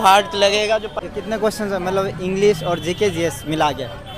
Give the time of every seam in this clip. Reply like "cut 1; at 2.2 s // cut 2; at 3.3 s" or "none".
cut 1; at 1.0 s